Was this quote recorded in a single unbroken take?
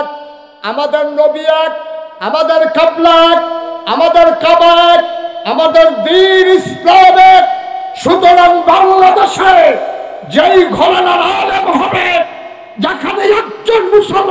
yes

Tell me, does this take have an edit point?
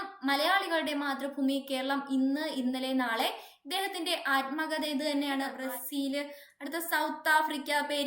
yes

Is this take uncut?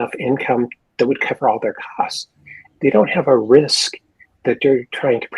yes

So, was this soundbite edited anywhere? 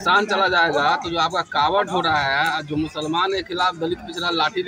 no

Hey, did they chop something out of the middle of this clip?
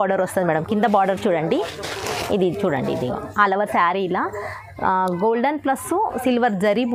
no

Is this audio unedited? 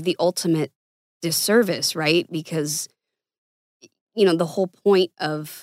yes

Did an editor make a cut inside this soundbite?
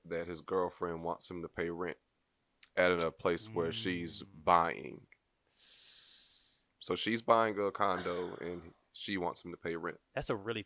no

